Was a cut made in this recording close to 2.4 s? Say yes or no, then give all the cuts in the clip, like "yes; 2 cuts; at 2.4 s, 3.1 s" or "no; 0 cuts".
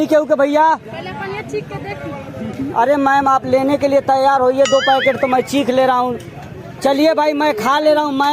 yes; 1 cut; at 2.4 s